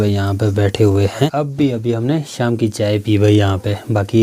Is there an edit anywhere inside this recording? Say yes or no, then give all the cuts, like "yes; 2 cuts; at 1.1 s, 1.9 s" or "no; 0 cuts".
no; 0 cuts